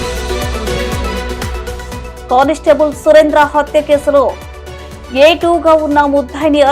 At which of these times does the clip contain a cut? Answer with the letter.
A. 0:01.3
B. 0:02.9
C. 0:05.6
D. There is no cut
A